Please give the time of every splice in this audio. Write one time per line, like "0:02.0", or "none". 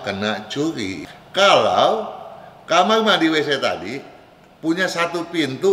0:00.9